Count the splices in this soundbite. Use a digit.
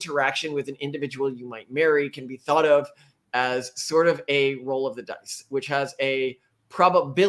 0